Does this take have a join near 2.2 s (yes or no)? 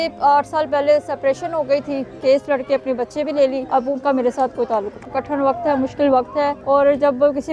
yes